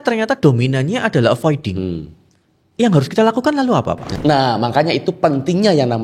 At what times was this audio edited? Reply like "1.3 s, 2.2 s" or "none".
4.1 s